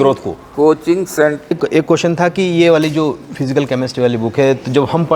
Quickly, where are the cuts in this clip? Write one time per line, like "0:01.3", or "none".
0:01.5